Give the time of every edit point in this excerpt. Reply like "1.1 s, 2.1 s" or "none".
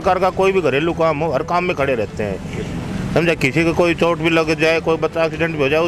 none